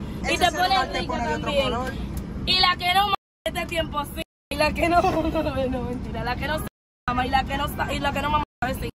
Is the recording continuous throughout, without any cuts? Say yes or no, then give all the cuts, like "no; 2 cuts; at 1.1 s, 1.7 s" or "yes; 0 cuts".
yes; 0 cuts